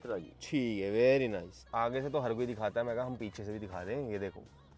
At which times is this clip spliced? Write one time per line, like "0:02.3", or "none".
0:01.6